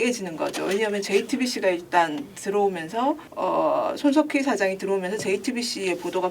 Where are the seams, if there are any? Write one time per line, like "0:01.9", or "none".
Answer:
0:03.3